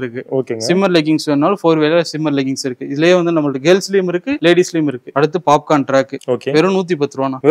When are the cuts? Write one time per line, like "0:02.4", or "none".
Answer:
0:05.1